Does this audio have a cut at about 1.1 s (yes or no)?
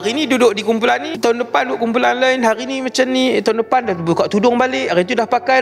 yes